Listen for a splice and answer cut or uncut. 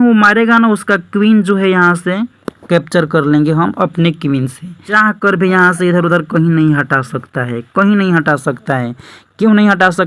cut